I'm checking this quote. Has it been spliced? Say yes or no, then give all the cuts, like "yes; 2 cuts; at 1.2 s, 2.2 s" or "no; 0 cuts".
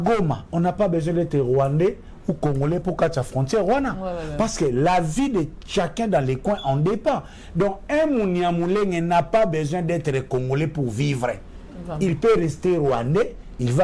no; 0 cuts